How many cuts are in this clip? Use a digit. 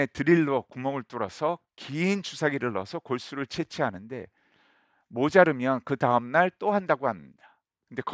0